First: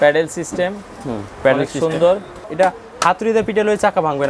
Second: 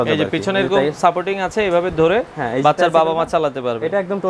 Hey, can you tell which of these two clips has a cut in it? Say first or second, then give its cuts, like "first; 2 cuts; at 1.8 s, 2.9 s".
first; 1 cut; at 2.4 s